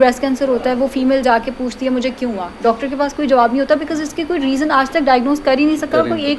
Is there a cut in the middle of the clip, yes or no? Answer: no